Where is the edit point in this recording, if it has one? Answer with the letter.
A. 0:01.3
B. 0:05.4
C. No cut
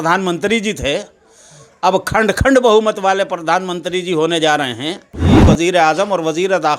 B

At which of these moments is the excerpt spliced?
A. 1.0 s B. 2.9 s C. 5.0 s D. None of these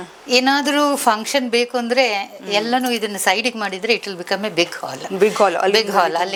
D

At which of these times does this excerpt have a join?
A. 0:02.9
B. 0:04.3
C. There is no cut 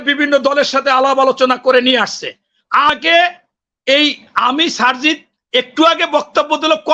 A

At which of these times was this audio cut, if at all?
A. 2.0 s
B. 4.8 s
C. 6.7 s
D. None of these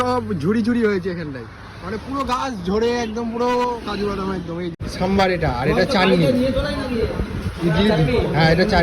B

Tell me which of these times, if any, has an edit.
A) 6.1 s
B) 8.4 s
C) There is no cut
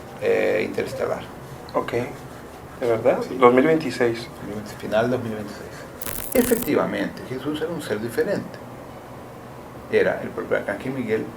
A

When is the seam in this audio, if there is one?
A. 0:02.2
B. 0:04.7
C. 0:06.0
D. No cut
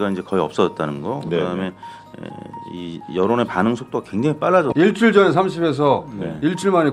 B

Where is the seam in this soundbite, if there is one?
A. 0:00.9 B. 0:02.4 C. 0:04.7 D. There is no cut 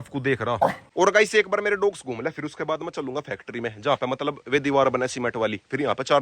A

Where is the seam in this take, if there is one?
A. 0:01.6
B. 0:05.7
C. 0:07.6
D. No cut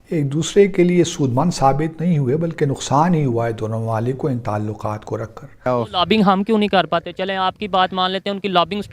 B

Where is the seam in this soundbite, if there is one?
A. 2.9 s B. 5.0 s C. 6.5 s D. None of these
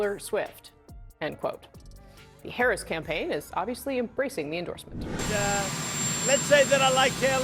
B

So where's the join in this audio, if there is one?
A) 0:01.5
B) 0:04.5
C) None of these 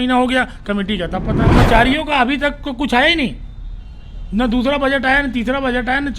A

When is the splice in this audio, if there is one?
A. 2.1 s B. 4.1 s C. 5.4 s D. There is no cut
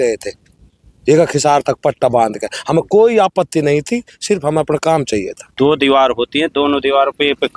C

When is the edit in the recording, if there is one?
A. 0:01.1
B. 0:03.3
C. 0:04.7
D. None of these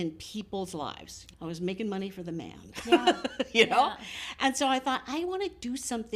A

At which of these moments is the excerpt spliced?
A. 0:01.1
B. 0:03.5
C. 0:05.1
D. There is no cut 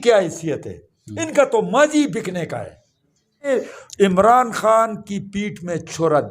B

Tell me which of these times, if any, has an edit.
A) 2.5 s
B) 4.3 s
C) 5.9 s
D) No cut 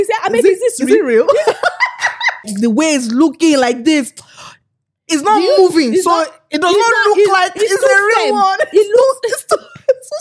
A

